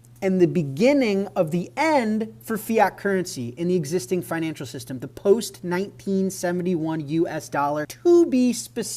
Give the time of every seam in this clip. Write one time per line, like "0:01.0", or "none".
0:07.9